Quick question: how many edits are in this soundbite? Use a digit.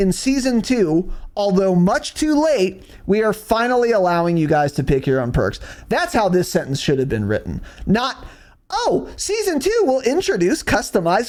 0